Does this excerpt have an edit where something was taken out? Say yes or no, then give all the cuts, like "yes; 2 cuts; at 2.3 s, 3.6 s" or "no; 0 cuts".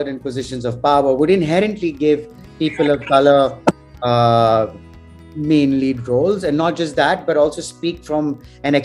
no; 0 cuts